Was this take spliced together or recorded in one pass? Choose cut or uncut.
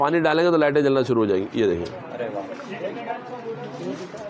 uncut